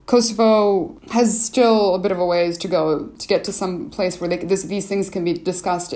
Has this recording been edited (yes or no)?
yes